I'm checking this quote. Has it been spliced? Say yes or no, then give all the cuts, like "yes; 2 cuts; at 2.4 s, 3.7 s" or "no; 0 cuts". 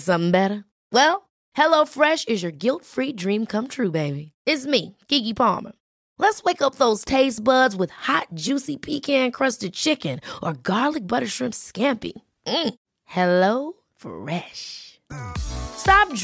no; 0 cuts